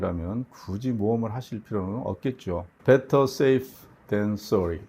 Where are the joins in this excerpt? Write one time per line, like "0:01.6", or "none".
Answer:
0:02.7